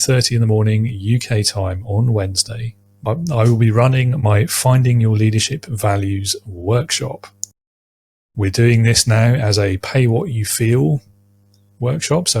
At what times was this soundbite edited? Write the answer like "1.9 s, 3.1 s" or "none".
3.0 s

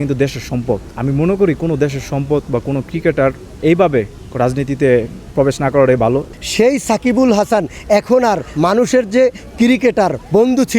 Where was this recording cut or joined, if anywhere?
3.6 s, 5.2 s, 6.3 s

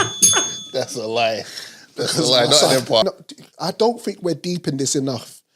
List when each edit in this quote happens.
3.0 s

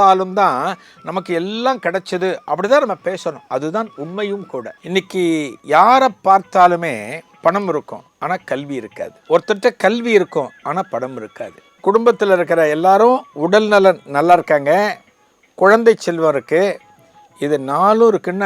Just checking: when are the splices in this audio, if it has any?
4.8 s, 7.2 s, 8.0 s, 9.2 s, 11.6 s

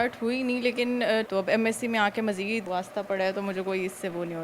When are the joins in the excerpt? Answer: 1.3 s, 2.6 s

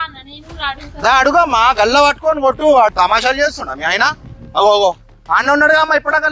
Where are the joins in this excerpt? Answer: 2.9 s

